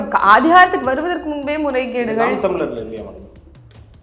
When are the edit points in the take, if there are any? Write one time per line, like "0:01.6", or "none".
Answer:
none